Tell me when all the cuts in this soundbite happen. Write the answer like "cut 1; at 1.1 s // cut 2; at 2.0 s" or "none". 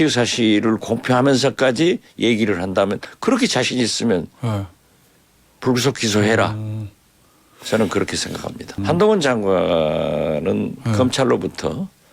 cut 1; at 8.8 s